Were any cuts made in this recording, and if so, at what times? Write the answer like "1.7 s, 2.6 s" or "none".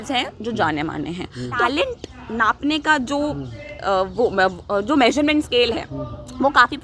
1.6 s